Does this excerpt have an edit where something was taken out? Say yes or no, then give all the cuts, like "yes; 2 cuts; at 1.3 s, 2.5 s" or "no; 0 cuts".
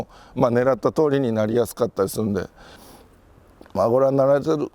yes; 1 cut; at 2.8 s